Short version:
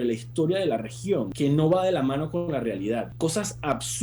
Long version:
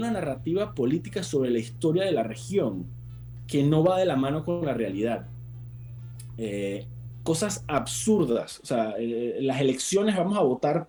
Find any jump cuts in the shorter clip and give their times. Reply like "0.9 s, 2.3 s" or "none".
1.3 s, 3.1 s